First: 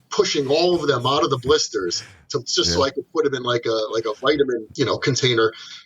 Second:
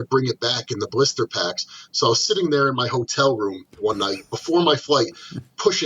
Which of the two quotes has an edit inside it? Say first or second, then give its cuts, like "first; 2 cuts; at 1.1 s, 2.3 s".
first; 1 cut; at 4.7 s